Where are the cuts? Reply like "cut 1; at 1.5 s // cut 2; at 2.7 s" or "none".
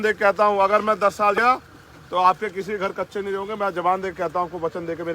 cut 1; at 1.4 s